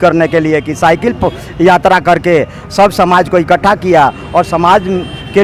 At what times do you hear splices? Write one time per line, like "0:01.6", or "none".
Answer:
none